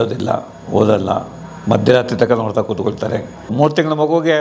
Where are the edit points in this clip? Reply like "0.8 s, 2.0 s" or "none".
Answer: 3.5 s